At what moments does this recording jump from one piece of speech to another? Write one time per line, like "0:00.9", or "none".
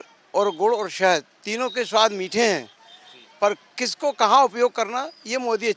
none